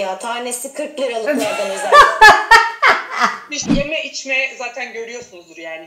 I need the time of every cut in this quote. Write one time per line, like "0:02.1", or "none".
0:03.7